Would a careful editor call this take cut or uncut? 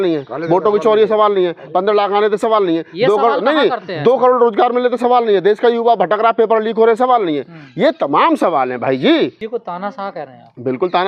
cut